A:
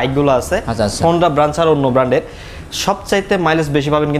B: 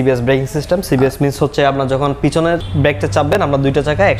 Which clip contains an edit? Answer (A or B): B